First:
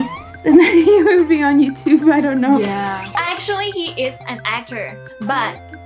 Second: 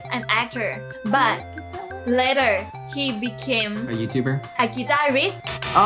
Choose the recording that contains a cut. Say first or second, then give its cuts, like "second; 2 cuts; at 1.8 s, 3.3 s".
first; 1 cut; at 3.0 s